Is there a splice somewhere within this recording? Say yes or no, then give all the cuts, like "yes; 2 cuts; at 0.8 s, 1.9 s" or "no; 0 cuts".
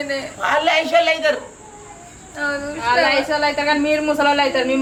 no; 0 cuts